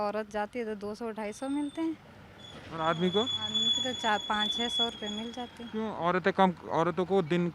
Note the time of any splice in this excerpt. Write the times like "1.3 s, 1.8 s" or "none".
none